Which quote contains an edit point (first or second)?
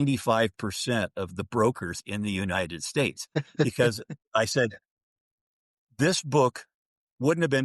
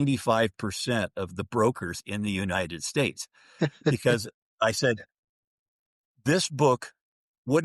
first